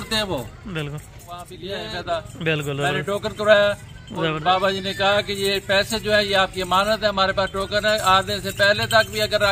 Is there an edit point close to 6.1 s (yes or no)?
no